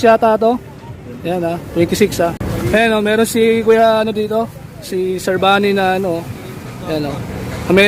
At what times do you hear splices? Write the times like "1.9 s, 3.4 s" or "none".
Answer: 2.4 s